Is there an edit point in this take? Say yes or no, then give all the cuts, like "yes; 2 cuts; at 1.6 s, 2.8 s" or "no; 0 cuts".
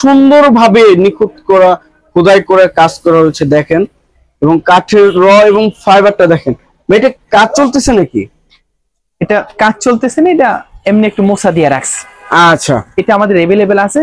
no; 0 cuts